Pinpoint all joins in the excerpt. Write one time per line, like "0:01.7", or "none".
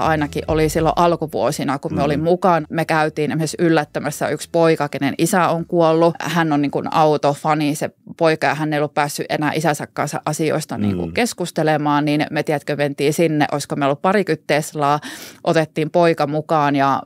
0:02.6
0:06.2